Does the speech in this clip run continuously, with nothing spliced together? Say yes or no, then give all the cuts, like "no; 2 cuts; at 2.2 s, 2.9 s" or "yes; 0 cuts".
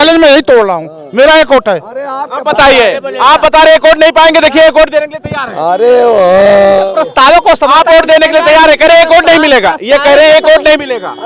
yes; 0 cuts